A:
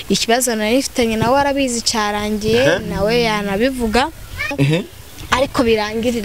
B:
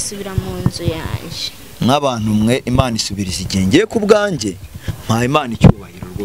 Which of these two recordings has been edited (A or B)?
A